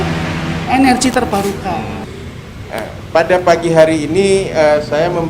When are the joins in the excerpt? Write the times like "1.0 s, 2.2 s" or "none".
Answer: 2.1 s